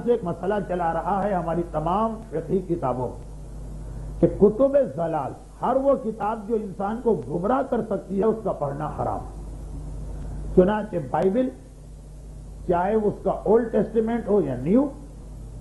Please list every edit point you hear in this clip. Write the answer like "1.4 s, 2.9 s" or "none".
13.9 s